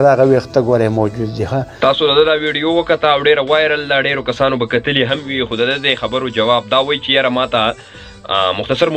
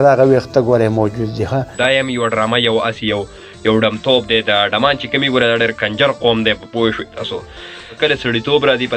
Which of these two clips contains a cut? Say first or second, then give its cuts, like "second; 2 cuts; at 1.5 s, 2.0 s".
second; 2 cuts; at 1.7 s, 8.0 s